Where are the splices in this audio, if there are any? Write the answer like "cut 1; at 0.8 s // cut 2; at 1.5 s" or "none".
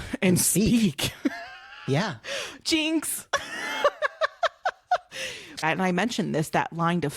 cut 1; at 5.6 s